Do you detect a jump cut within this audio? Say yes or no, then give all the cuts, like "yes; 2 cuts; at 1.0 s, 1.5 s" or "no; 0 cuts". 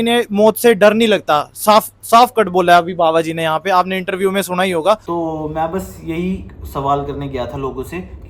yes; 1 cut; at 5.0 s